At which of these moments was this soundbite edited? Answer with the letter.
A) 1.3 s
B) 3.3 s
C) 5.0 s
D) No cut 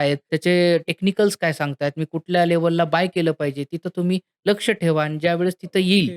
D